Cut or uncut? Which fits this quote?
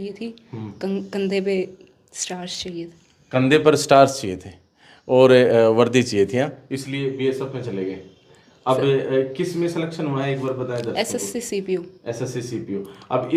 uncut